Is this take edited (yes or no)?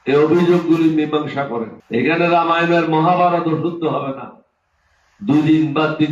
yes